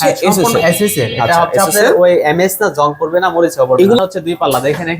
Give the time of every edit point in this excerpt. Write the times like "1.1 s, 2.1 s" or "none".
4.0 s